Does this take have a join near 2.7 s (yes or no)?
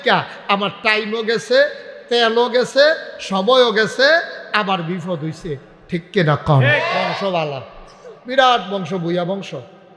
no